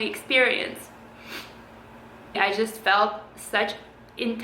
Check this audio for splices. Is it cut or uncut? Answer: cut